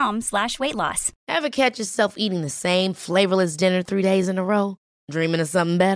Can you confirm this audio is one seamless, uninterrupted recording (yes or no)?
no